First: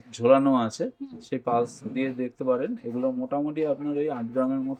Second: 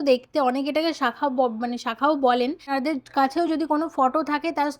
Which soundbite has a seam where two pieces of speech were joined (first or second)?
second